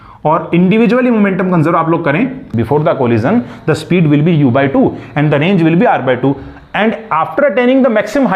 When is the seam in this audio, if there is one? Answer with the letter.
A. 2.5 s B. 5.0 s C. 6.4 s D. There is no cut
A